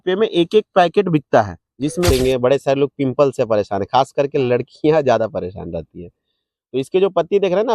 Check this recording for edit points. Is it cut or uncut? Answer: cut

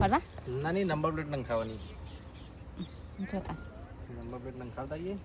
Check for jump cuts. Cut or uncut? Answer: uncut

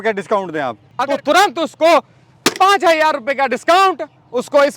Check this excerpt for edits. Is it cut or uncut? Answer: cut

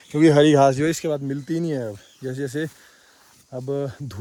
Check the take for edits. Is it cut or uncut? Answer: uncut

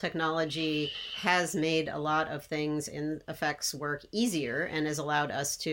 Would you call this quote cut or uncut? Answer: uncut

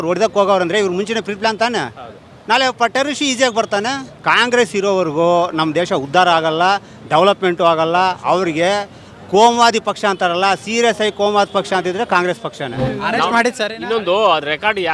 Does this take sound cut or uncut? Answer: uncut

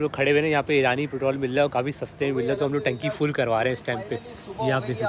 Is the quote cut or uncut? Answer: uncut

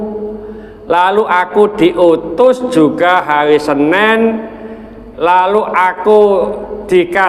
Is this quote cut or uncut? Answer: uncut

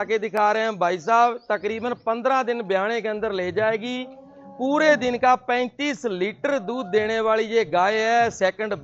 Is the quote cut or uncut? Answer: uncut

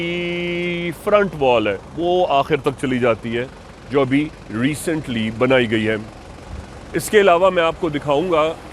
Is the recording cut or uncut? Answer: uncut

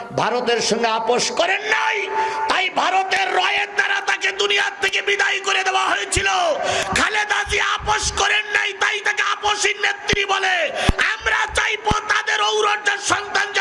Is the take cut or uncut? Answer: uncut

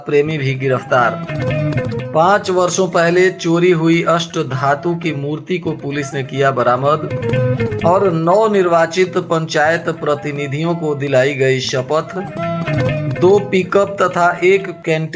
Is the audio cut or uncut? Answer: uncut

